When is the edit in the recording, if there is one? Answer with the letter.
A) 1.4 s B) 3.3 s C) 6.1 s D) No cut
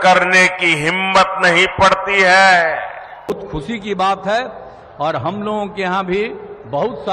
B